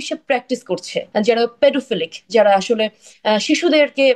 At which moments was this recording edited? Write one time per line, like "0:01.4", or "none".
0:01.0